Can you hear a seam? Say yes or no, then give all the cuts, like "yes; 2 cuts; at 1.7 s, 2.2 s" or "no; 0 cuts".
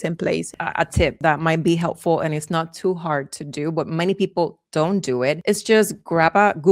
yes; 2 cuts; at 1.0 s, 5.4 s